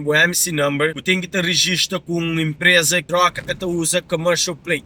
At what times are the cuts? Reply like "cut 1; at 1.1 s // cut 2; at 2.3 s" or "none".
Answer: cut 1; at 1.0 s // cut 2; at 3.0 s